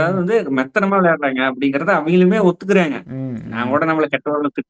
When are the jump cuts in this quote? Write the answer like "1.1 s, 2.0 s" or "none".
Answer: none